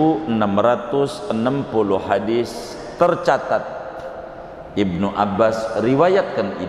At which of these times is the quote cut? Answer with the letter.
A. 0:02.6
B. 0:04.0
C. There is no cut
C